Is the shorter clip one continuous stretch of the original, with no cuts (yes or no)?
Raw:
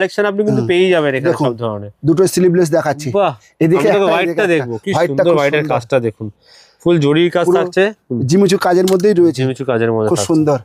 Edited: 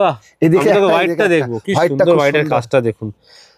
yes